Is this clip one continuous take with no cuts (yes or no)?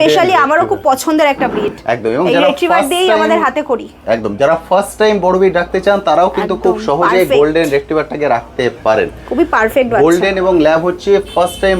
yes